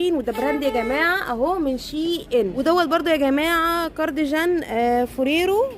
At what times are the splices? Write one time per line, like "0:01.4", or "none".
0:02.6